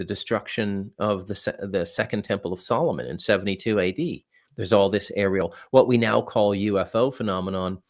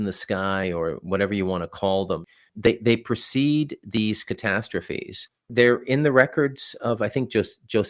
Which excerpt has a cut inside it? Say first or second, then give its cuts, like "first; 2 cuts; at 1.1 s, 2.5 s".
second; 2 cuts; at 2.2 s, 5.5 s